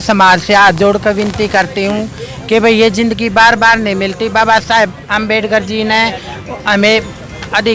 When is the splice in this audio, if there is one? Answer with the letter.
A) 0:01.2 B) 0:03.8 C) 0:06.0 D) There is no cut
D